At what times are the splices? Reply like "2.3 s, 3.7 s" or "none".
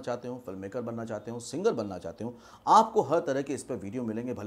none